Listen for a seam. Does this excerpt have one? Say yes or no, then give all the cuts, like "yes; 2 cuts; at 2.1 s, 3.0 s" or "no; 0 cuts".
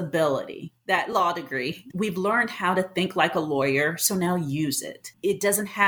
yes; 2 cuts; at 1.8 s, 5.1 s